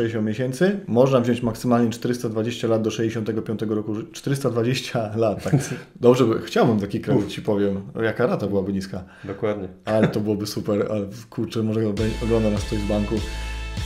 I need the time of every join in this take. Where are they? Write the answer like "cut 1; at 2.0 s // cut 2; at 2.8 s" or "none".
none